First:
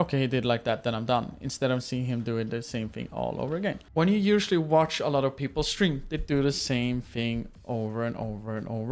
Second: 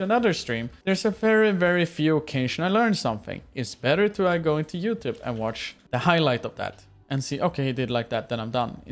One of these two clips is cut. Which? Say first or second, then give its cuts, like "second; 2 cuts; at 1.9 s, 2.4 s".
first; 1 cut; at 3.8 s